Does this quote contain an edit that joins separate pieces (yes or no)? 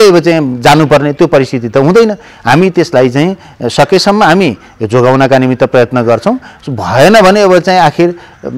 no